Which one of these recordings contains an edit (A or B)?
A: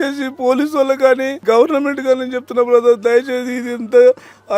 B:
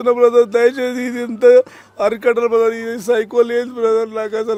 A